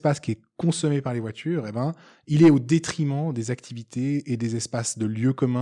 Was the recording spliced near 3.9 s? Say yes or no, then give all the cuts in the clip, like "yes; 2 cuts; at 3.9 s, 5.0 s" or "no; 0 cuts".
no; 0 cuts